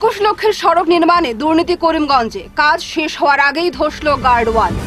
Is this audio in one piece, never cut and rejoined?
yes; 0 cuts

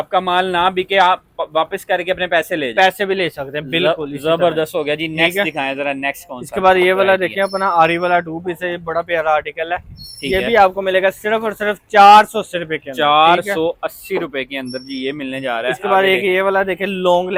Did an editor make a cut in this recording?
no; 0 cuts

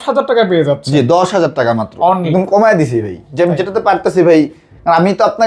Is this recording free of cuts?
no; 1 cut; at 2.3 s

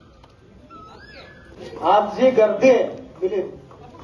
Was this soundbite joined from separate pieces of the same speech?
yes; 1 cut; at 1.6 s

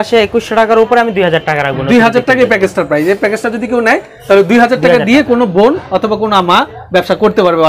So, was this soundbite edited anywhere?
no; 0 cuts

